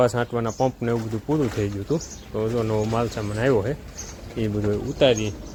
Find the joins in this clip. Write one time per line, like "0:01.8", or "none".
none